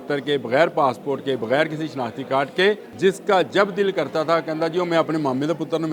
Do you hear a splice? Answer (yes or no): yes